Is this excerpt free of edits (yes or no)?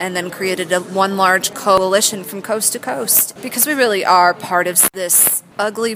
no